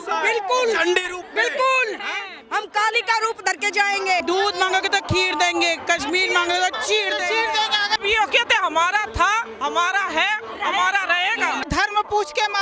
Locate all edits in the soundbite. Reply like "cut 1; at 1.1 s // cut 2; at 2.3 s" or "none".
cut 1; at 4.2 s // cut 2; at 8.0 s // cut 3; at 11.7 s